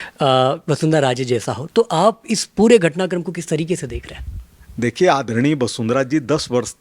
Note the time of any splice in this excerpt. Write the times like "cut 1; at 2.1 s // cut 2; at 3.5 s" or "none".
none